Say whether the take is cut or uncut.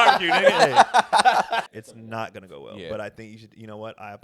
cut